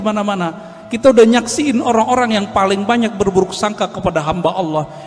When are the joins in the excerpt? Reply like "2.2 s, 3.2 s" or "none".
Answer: none